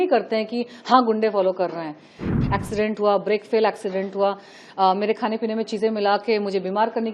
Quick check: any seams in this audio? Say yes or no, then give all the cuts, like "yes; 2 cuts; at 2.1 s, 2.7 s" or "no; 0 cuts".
yes; 1 cut; at 2.2 s